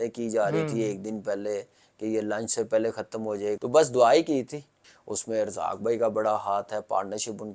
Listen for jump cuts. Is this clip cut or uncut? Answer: cut